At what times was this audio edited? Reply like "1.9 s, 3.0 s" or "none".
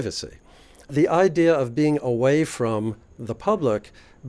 0.9 s